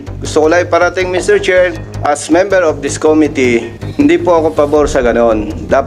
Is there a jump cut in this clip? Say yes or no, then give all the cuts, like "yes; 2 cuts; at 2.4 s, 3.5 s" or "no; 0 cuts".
yes; 2 cuts; at 1.9 s, 3.8 s